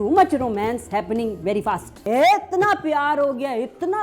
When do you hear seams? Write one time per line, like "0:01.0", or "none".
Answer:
0:02.0